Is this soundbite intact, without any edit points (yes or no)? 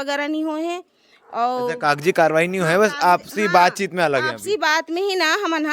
yes